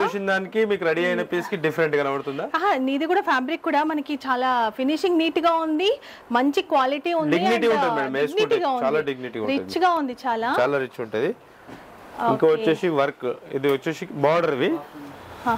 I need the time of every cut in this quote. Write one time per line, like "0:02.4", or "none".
none